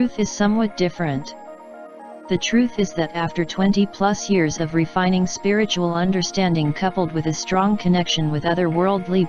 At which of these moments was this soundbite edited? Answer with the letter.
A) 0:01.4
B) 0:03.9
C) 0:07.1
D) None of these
A